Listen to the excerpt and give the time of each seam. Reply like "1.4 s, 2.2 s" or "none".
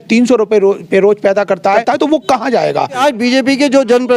1.8 s, 3.0 s